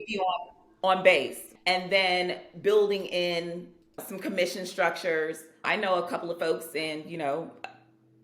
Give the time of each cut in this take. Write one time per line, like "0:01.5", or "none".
0:01.4
0:04.0
0:05.6